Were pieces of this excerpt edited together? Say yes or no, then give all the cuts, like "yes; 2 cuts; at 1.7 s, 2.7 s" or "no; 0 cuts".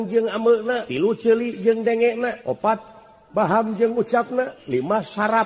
yes; 3 cuts; at 0.9 s, 2.4 s, 4.6 s